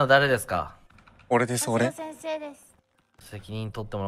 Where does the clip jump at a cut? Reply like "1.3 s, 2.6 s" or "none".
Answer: none

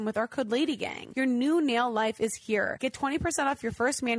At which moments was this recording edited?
1.0 s, 2.7 s

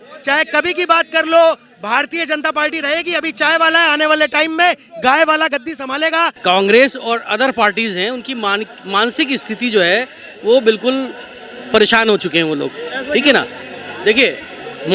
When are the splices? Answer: 6.4 s

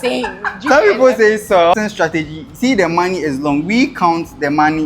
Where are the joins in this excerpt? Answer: 1.8 s

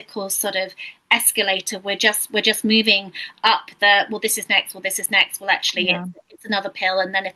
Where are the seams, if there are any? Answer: none

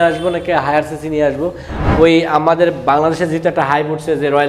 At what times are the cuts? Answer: 1.8 s

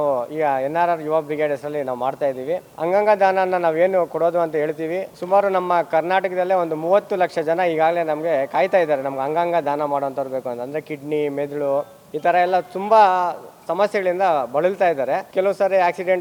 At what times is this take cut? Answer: none

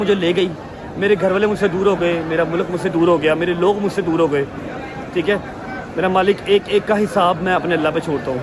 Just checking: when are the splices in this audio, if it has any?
none

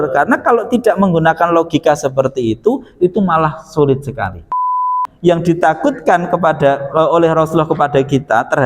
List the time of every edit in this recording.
4.8 s

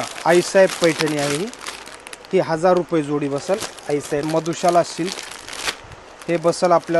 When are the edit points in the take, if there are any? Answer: 4.3 s

